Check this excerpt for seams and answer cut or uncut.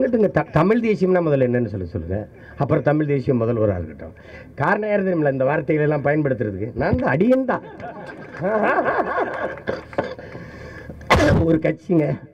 uncut